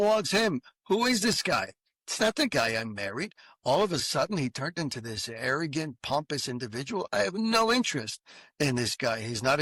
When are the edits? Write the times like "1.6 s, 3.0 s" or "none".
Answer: none